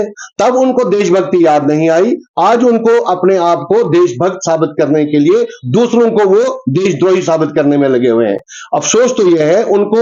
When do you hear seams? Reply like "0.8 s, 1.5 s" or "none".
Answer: none